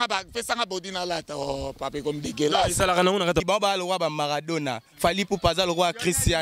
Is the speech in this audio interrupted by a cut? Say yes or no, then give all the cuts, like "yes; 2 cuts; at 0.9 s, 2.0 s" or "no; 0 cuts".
yes; 1 cut; at 3.4 s